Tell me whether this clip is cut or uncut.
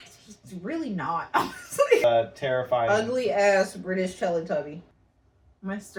uncut